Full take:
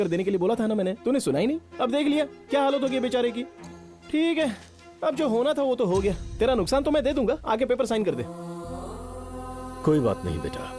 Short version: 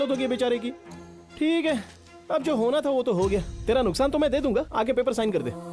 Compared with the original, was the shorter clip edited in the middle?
no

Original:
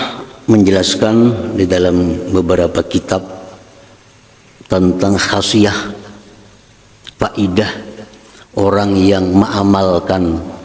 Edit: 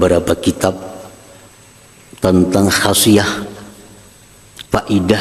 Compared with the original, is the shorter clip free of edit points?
yes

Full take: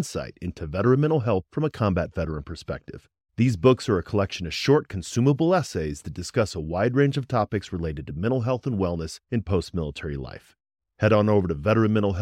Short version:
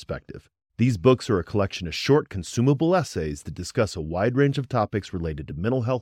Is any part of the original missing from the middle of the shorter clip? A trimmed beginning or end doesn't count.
no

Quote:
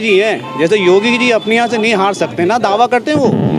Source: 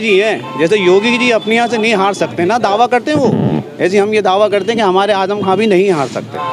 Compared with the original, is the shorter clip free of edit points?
yes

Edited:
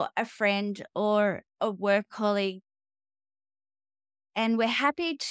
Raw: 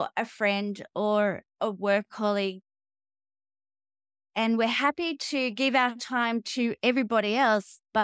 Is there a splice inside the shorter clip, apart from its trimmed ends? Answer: no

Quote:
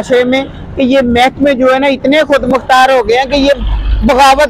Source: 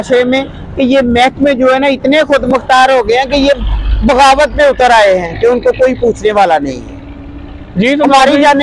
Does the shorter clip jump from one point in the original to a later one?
no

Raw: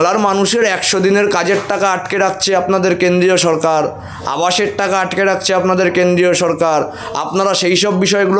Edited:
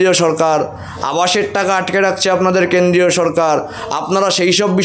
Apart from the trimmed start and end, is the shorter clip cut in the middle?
no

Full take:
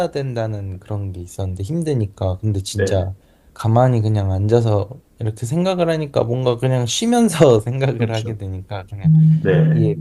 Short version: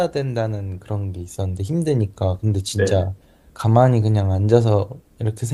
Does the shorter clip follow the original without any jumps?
yes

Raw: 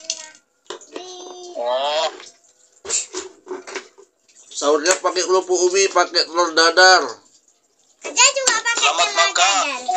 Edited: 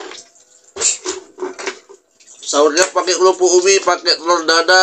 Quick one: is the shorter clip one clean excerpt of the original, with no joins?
yes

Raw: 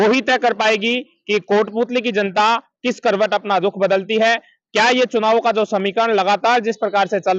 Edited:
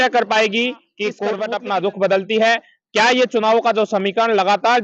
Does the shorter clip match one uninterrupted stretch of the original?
no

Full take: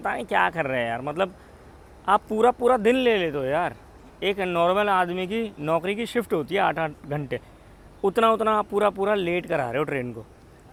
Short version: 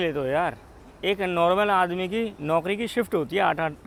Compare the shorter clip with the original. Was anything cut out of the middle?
no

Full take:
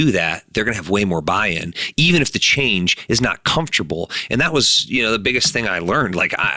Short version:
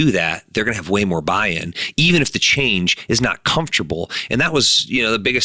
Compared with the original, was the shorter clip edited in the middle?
no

